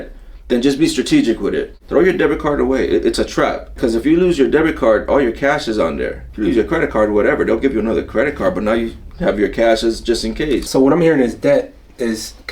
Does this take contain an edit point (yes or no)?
yes